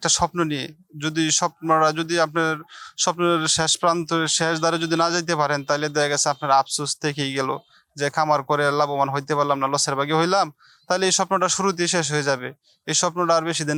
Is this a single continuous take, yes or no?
yes